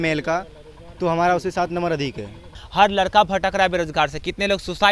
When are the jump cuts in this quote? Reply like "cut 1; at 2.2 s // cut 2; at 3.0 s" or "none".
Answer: cut 1; at 2.6 s